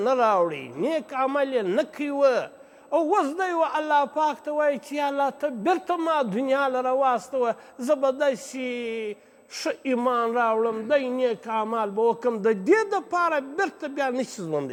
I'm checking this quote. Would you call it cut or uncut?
uncut